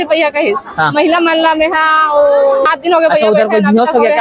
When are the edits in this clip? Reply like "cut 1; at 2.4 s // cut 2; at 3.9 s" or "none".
cut 1; at 2.7 s